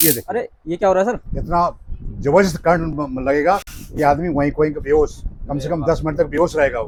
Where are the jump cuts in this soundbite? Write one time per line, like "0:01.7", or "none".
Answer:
none